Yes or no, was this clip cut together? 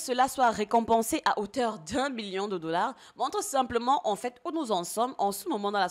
no